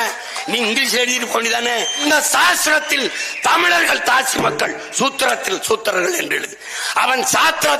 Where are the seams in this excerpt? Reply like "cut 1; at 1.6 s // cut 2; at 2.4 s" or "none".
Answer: cut 1; at 2.0 s